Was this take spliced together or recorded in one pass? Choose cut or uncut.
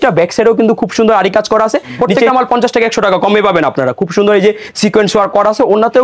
cut